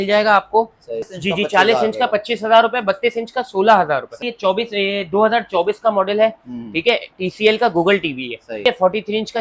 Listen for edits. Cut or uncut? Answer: cut